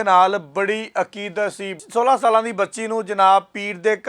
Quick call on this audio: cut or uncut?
cut